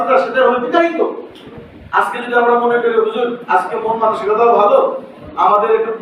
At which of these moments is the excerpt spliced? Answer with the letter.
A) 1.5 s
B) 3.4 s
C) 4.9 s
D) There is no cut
A